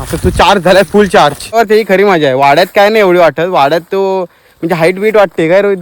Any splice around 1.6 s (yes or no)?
yes